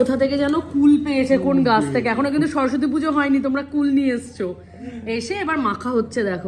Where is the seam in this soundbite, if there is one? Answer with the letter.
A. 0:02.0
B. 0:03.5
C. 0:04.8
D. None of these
D